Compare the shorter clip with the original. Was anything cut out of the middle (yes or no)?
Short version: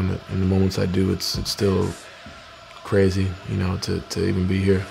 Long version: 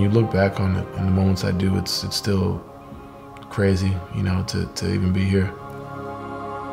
no